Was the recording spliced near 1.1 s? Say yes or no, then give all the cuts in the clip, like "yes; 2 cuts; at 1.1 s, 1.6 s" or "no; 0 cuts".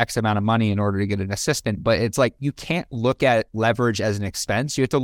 no; 1 cut; at 2.4 s